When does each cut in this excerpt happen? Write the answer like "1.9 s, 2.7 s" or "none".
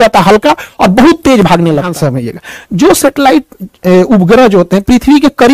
1.9 s